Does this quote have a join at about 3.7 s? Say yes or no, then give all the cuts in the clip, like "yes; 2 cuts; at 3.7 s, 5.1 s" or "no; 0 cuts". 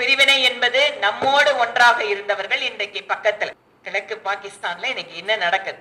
yes; 1 cut; at 3.7 s